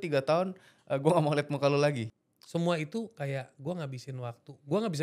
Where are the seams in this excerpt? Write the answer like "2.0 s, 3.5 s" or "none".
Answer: 2.1 s